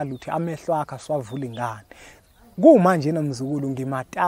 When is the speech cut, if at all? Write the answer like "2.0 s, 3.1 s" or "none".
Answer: none